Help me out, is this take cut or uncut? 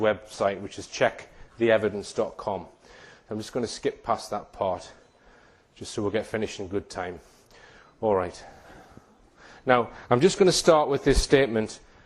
cut